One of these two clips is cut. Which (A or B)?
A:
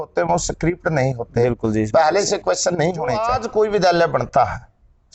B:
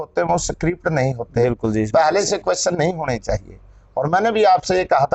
A